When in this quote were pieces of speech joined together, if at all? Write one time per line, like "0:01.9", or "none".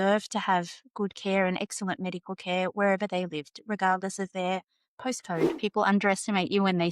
0:05.6

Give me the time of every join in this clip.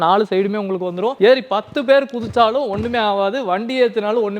0:01.1

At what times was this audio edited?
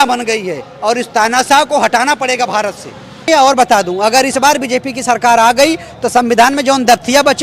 0:03.3

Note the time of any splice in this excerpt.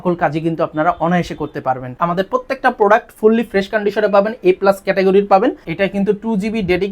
0:02.0
0:05.7

